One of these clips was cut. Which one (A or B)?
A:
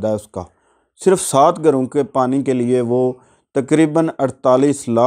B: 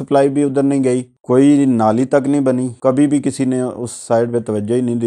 B